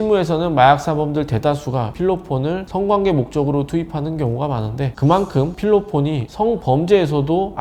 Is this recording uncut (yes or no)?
yes